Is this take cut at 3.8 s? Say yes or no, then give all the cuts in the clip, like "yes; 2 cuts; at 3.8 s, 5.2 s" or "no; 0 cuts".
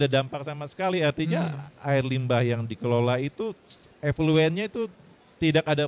no; 0 cuts